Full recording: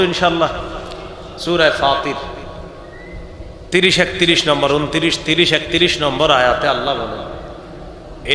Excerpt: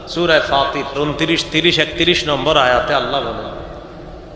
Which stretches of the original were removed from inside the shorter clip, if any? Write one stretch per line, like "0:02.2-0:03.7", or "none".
0:02.3-0:04.7